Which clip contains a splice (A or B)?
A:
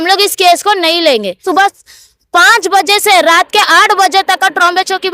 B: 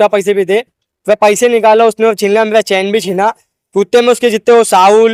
A